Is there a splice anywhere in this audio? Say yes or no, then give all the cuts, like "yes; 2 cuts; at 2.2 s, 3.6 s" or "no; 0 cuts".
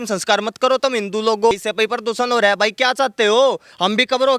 yes; 1 cut; at 1.5 s